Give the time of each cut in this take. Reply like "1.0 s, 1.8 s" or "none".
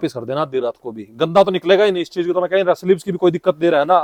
none